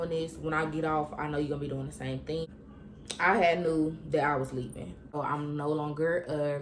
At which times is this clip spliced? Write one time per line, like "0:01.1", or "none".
0:02.5
0:05.0